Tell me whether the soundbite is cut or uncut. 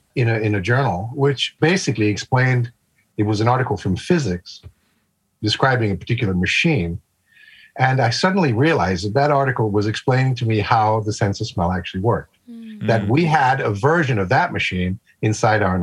uncut